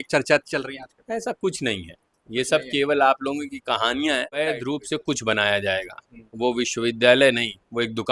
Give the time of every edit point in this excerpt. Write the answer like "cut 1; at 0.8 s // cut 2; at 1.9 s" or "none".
cut 1; at 4.5 s